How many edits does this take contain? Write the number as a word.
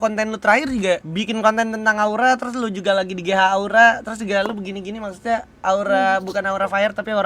zero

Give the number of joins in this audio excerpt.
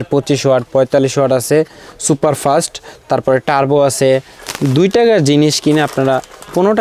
one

